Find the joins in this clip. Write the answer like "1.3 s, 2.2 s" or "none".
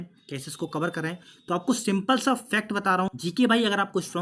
3.1 s